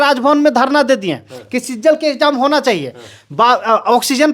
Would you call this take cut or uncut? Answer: uncut